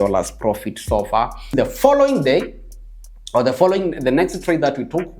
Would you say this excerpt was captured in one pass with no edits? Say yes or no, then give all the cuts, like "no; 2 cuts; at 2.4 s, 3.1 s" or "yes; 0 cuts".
no; 1 cut; at 1.5 s